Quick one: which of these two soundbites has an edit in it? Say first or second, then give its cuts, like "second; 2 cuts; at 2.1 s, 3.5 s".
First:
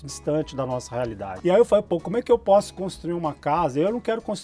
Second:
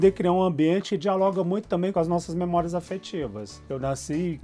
second; 2 cuts; at 0.9 s, 1.9 s